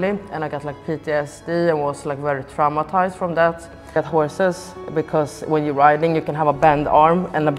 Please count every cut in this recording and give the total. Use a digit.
0